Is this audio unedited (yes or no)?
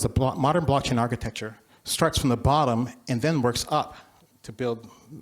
yes